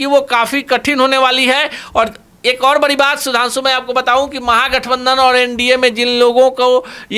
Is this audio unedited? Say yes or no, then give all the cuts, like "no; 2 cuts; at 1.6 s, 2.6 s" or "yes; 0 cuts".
yes; 0 cuts